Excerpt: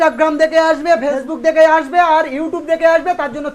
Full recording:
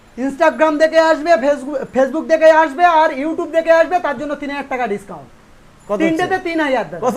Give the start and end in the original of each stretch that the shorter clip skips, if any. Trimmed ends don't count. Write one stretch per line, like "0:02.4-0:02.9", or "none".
0:01.7-0:02.1